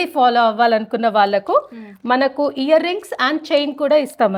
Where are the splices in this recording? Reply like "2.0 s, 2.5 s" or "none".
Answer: none